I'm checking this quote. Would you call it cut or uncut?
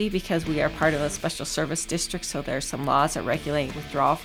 uncut